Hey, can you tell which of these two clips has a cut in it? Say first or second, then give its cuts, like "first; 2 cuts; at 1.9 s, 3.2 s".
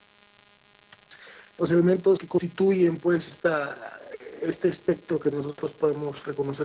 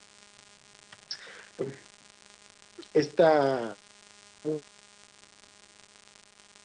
first; 1 cut; at 1.6 s